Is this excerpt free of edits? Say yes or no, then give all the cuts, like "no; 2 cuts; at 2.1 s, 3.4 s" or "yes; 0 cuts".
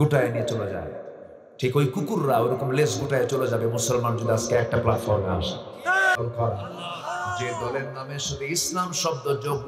no; 1 cut; at 6.2 s